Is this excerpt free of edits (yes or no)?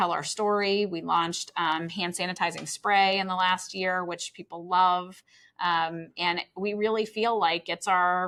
yes